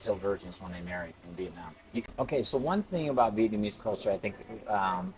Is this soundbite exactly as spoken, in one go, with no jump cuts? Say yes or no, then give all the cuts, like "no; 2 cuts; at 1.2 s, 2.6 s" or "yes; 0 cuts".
no; 1 cut; at 2.0 s